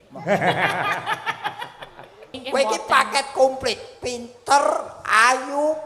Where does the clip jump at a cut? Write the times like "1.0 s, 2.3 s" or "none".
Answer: 2.4 s

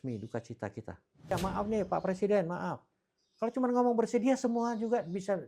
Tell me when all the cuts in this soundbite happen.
1.3 s

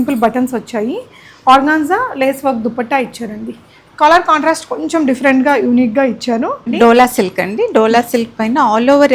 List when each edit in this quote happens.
6.6 s

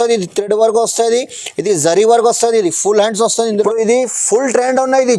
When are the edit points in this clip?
3.5 s

